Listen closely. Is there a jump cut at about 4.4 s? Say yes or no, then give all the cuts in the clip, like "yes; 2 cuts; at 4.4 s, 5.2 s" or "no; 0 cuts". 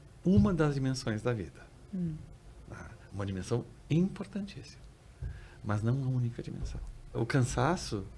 no; 1 cut; at 7.2 s